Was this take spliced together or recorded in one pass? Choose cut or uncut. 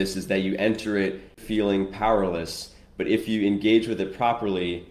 cut